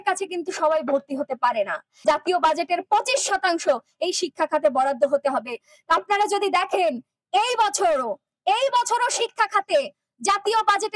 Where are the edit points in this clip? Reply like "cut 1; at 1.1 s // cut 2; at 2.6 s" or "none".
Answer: cut 1; at 1.9 s